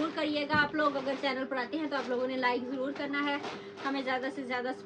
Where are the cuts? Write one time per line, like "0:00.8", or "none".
none